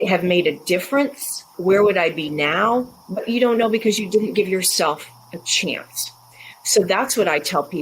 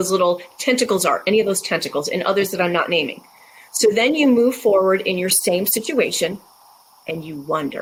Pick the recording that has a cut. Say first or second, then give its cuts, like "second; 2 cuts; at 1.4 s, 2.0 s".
first; 1 cut; at 1.5 s